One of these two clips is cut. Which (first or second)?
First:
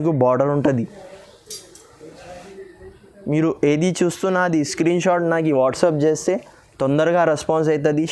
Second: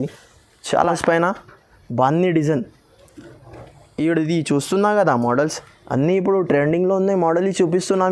second